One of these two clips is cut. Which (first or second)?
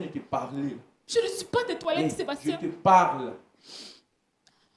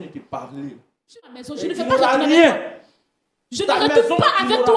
second